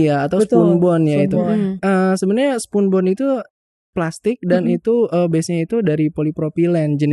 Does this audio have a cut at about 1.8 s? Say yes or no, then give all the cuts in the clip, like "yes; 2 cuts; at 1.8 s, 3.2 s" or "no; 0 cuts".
yes; 1 cut; at 1.8 s